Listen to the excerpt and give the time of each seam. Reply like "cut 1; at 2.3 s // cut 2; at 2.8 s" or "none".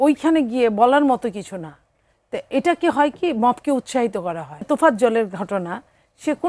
cut 1; at 4.6 s